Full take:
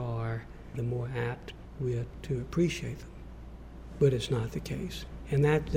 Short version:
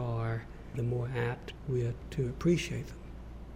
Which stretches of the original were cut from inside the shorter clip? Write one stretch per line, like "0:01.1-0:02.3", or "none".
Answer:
0:01.5-0:01.6

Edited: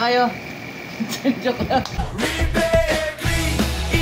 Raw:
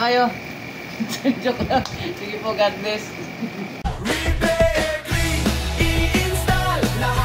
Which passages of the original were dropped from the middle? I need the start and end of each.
0:01.9-0:03.8

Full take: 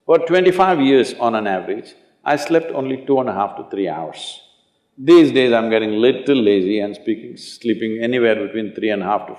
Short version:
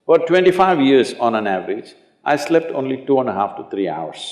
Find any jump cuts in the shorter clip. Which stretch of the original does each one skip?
none

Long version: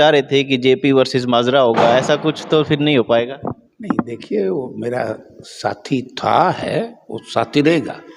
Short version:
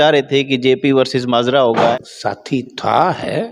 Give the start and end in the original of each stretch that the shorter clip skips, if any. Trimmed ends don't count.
0:02.0-0:05.4

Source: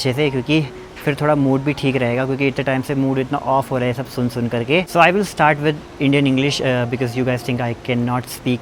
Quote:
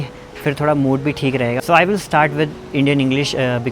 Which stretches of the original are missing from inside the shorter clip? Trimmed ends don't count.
0:02.2-0:04.9

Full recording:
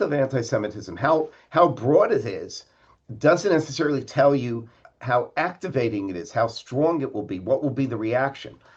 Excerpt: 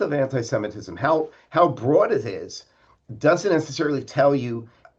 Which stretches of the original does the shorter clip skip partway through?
none

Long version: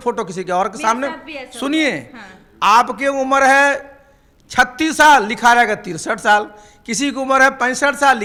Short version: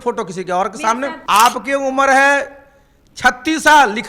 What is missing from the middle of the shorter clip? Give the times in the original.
0:01.2-0:02.5

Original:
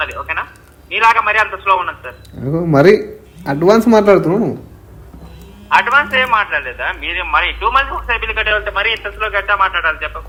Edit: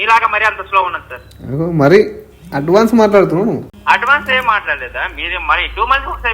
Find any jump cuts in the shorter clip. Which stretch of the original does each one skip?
0:04.7-0:05.6

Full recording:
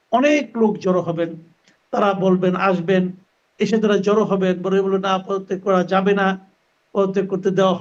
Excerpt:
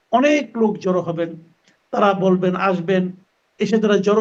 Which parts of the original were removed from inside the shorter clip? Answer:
none

